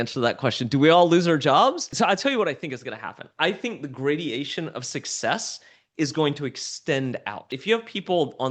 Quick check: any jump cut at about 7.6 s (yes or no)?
yes